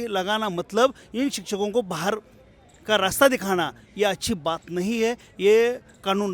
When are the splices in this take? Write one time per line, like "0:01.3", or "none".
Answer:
none